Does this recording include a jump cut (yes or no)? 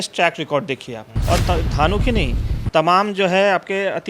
yes